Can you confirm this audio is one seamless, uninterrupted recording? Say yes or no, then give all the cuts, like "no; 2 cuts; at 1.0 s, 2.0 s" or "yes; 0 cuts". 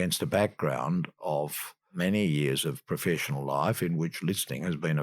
no; 1 cut; at 1.9 s